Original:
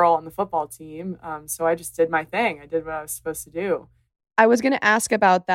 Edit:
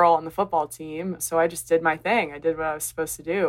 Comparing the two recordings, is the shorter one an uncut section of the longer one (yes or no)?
no